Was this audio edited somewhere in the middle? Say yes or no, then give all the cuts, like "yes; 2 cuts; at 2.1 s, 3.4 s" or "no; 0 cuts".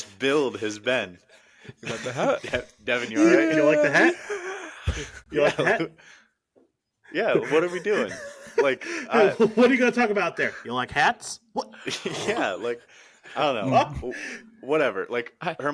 no; 0 cuts